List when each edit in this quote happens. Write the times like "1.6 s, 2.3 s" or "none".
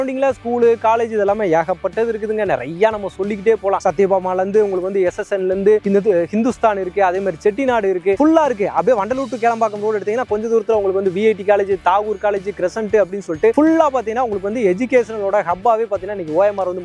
none